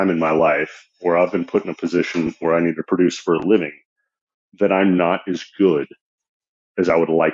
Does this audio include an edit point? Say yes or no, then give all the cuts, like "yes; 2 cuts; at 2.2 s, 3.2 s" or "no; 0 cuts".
no; 0 cuts